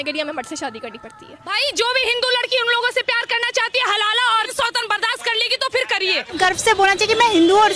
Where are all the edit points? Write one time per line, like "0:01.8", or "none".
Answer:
0:01.5
0:04.5
0:06.3